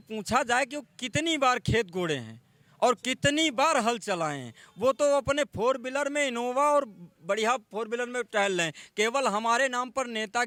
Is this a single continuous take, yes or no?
yes